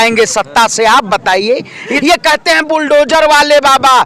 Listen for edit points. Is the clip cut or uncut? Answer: cut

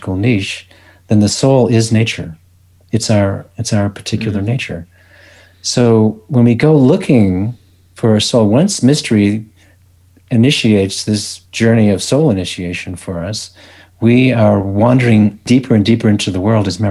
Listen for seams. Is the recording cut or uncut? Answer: uncut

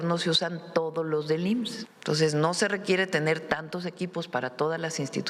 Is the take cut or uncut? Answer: cut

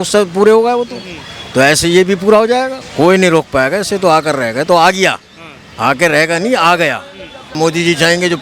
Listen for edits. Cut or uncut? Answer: cut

